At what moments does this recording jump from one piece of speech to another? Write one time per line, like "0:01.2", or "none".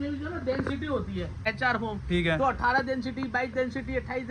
none

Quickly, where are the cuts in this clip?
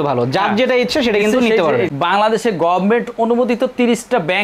0:01.9

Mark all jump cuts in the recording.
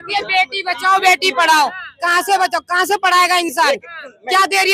none

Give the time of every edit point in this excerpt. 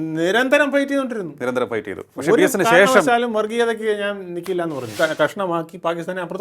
0:04.9

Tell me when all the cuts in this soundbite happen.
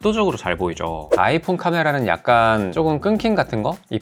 0:01.1

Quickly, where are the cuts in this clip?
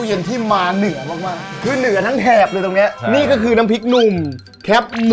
0:03.0

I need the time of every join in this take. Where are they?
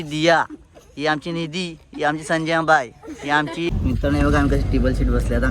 0:03.7

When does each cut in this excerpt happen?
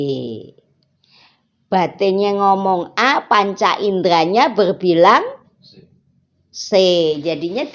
none

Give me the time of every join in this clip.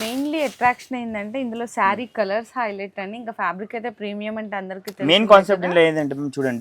none

